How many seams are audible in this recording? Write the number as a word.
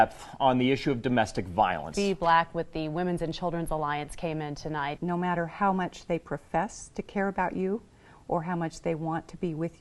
zero